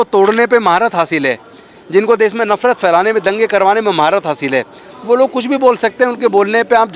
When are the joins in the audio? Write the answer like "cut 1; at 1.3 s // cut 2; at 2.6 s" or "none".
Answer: none